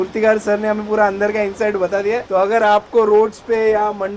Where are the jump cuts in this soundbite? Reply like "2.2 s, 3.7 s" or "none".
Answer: 2.2 s